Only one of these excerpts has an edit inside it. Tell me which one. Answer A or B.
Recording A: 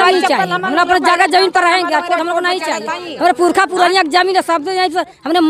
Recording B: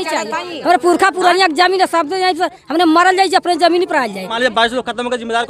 B